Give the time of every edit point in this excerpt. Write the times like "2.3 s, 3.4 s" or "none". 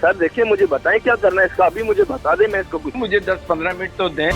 2.9 s